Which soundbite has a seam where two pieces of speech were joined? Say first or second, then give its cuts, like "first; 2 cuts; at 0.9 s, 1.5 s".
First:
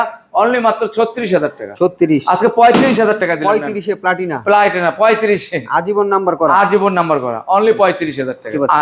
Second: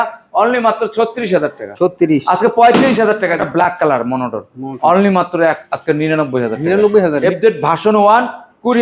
second; 2 cuts; at 3.3 s, 7.2 s